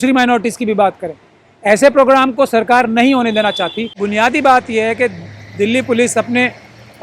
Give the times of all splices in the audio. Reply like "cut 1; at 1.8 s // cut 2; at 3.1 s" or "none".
cut 1; at 4.0 s